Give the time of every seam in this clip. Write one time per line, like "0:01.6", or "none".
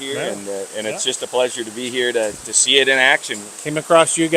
0:03.4